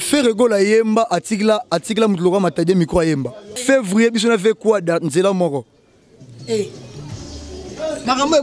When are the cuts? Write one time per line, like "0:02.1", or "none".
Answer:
0:03.6